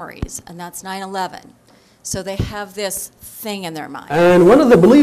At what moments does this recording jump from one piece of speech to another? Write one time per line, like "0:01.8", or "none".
0:03.9